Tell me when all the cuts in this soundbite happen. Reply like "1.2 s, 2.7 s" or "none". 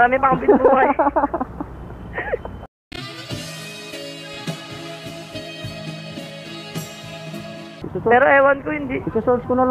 7.7 s